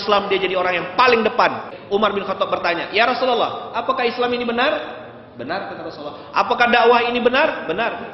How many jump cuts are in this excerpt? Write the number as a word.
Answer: one